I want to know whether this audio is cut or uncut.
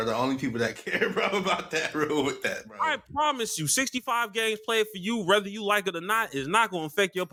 uncut